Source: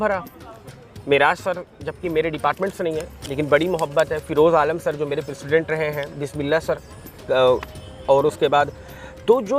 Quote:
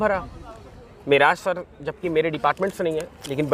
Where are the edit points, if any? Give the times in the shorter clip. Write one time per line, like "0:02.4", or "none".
none

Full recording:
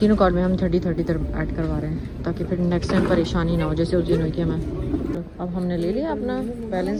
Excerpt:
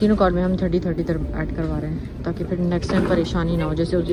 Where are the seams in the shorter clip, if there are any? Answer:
none

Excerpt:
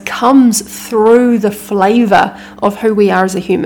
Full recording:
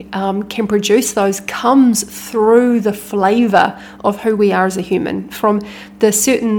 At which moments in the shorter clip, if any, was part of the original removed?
none

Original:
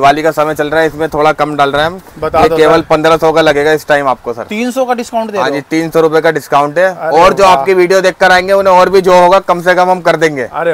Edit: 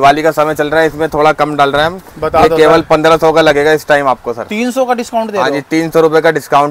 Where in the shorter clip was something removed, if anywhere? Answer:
none

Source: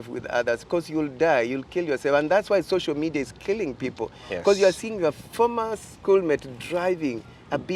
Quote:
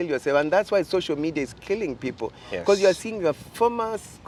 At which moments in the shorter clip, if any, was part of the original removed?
none

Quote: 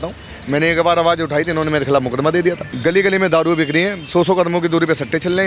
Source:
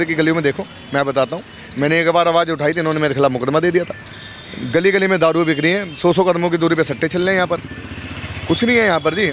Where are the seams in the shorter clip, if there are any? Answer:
0:02.7

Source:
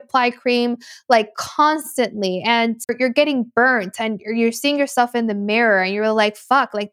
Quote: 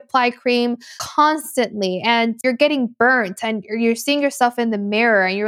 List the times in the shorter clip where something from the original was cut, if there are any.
0:00.9
0:02.4

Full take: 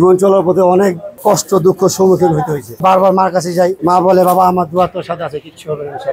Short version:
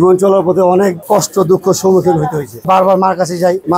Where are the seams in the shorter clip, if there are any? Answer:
0:01.0

